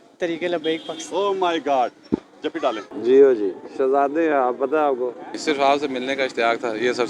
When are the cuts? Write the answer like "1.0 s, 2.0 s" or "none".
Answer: 2.9 s, 5.3 s

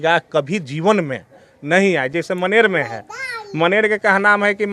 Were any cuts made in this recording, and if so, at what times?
none

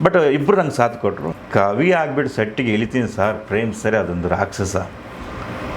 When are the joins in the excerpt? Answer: 1.3 s

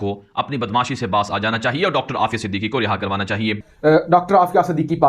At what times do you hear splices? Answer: 3.6 s

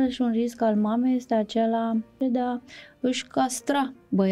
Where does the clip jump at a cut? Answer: 2.2 s

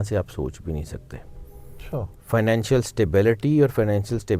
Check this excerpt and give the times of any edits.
2.2 s

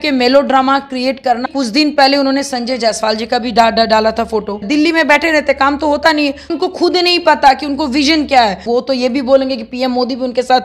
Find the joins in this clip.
1.5 s, 4.6 s, 6.5 s, 8.6 s

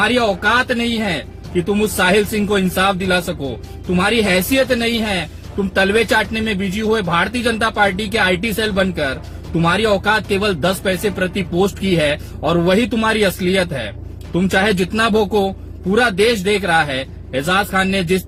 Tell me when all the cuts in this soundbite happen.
none

